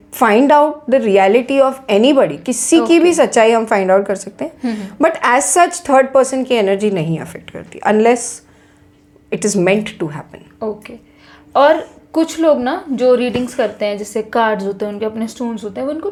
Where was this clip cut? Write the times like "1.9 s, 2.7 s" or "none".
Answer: none

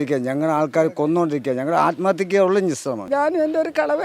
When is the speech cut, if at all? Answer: 3.1 s

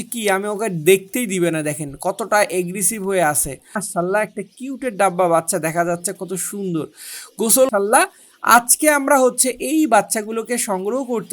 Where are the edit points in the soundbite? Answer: 3.8 s, 7.7 s

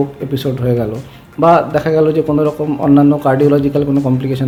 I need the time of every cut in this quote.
none

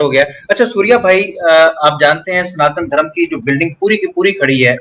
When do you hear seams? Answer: none

